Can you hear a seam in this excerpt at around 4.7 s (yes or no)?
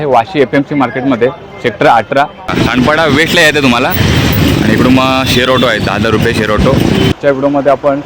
no